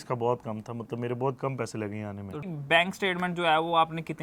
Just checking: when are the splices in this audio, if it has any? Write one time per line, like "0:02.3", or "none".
0:02.5